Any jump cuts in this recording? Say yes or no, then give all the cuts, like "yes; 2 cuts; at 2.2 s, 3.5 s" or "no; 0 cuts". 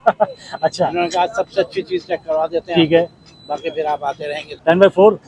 yes; 1 cut; at 4.4 s